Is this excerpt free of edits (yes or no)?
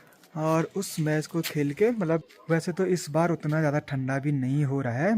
no